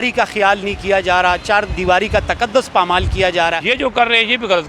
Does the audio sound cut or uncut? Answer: cut